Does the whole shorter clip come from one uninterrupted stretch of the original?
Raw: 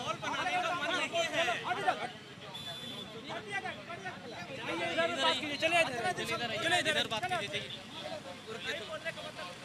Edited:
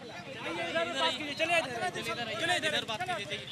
yes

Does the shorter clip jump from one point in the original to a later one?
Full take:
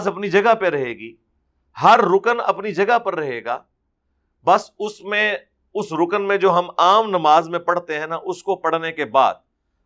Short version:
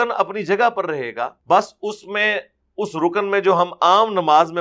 yes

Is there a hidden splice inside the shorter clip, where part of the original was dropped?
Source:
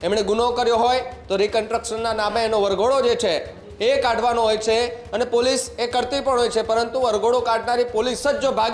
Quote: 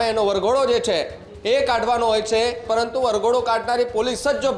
yes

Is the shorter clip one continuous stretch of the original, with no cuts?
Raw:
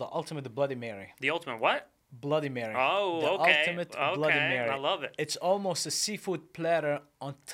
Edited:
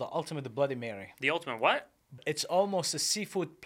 no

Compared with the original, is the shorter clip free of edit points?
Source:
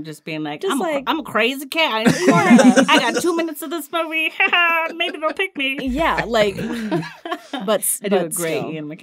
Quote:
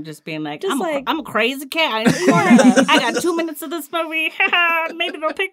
yes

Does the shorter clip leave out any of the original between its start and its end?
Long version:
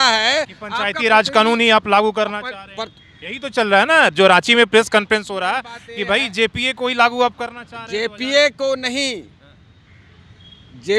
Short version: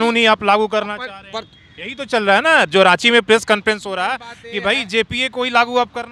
no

